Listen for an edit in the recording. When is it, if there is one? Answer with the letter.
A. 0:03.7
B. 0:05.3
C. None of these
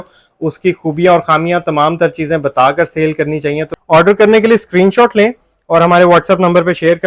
A